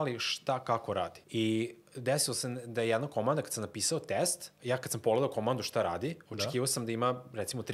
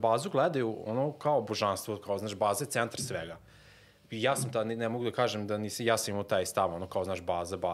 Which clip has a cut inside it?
first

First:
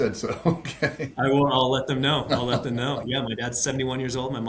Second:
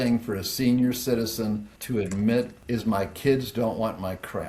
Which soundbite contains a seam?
second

